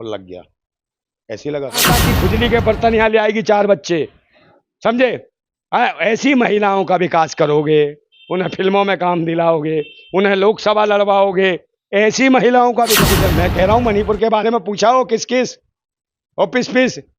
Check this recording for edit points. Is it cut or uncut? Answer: cut